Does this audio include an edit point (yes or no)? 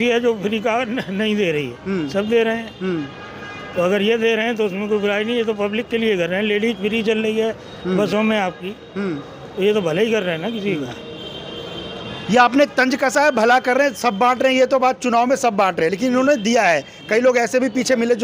no